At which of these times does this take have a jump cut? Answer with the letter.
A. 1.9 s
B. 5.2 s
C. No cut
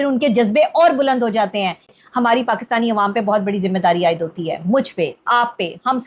A